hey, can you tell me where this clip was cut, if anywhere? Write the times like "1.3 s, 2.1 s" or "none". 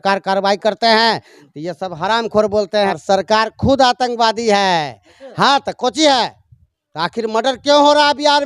2.9 s